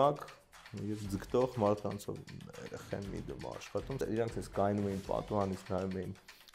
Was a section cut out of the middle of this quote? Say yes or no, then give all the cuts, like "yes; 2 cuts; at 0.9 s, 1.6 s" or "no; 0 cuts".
yes; 2 cuts; at 2.1 s, 4.0 s